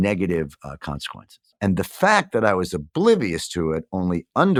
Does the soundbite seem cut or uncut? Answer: uncut